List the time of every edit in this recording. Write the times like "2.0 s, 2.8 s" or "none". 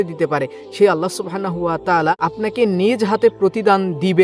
2.2 s